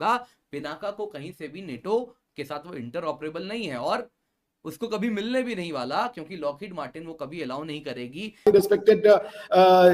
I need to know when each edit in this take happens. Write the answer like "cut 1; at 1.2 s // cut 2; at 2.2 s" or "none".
cut 1; at 8.4 s

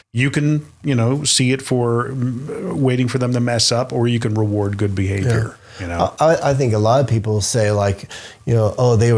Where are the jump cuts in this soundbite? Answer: none

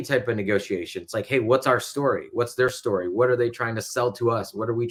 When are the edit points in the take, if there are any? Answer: none

